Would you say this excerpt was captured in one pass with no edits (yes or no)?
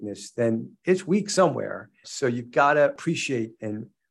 no